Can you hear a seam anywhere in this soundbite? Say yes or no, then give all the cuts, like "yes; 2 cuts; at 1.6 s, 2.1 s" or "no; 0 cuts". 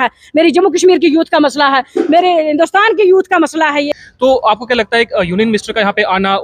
yes; 1 cut; at 3.9 s